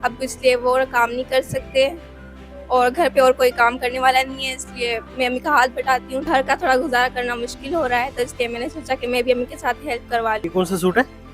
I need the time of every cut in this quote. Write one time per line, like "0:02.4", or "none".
0:06.2
0:10.4